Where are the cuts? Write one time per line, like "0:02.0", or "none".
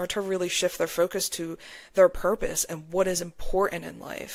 none